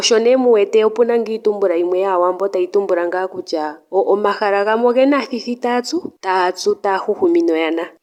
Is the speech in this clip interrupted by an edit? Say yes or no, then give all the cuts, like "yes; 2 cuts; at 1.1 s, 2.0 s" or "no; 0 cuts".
no; 0 cuts